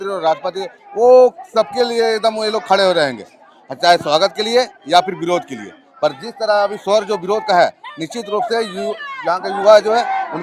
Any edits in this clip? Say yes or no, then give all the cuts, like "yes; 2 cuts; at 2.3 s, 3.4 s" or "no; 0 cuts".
no; 0 cuts